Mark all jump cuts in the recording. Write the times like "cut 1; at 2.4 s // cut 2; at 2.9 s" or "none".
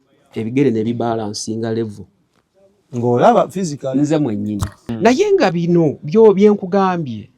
cut 1; at 4.9 s

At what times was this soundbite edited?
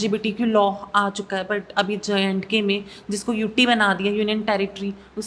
none

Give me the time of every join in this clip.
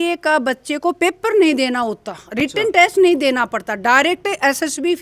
none

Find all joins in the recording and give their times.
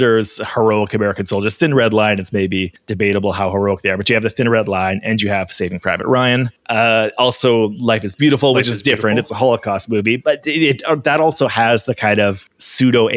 none

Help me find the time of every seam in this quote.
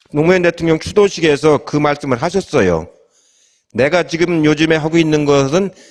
none

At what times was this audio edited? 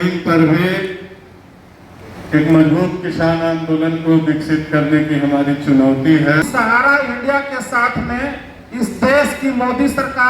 cut 1; at 6.9 s

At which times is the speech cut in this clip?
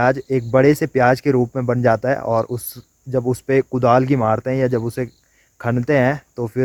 none

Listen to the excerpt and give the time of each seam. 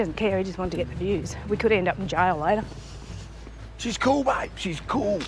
none

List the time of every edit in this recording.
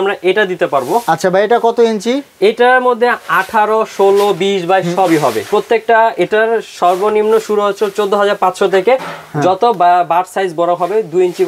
none

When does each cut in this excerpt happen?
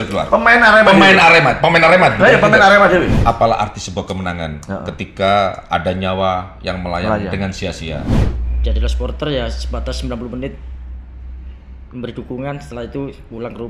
cut 1; at 3.1 s // cut 2; at 8.2 s

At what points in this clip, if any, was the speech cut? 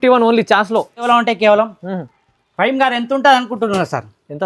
cut 1; at 1.0 s

